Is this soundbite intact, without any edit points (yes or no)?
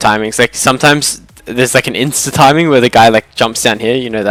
yes